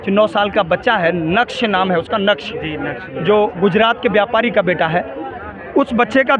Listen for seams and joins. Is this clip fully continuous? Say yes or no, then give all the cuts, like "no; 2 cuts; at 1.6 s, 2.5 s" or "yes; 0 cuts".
yes; 0 cuts